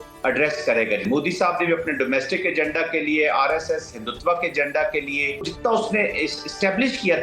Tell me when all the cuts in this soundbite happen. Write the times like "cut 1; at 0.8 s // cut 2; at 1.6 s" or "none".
cut 1; at 1.0 s // cut 2; at 5.5 s